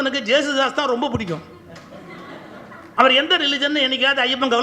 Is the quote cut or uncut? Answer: cut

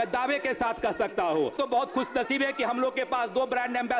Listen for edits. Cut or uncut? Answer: cut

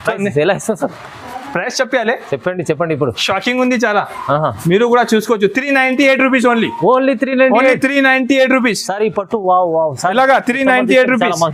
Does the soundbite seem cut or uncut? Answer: uncut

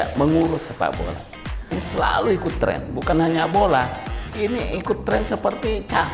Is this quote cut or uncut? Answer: cut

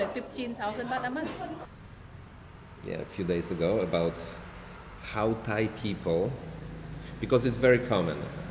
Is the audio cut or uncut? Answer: cut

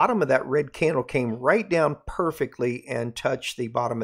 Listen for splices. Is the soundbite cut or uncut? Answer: uncut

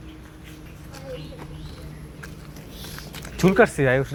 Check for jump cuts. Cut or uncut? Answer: uncut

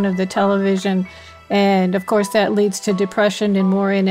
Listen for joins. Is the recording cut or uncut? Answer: uncut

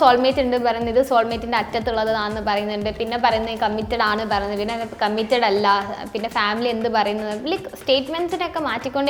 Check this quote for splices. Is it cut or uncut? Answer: uncut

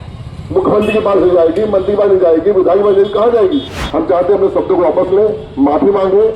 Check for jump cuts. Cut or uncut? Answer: cut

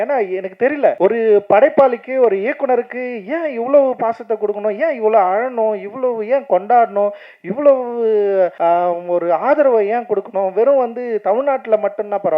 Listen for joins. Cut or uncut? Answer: cut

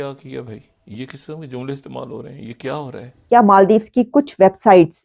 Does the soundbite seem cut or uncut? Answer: cut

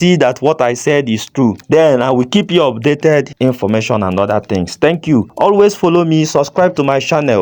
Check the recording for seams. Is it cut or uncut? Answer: uncut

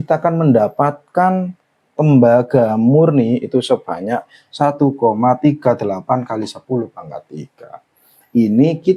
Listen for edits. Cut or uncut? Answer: uncut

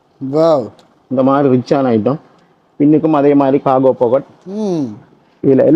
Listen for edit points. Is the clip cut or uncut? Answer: uncut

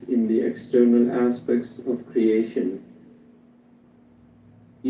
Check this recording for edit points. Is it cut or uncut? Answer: uncut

